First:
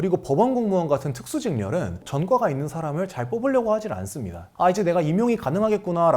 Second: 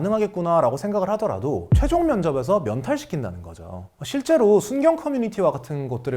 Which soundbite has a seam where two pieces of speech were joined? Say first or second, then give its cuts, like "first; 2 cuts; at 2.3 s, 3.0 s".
first; 2 cuts; at 2.0 s, 4.5 s